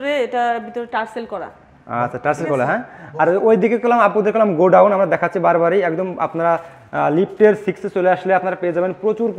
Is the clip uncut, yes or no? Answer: yes